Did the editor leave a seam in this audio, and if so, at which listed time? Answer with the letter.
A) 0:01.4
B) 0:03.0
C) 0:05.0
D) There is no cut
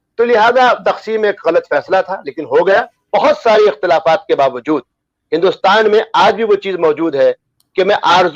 B